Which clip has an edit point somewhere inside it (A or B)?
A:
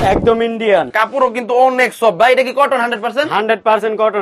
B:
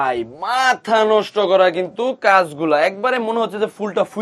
A